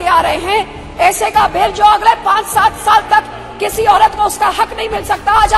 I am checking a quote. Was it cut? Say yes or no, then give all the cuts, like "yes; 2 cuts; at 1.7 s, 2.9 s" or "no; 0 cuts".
no; 0 cuts